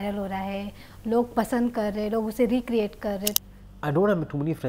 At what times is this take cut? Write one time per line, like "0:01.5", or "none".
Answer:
0:03.4